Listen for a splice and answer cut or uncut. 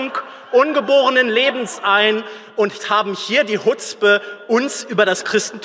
uncut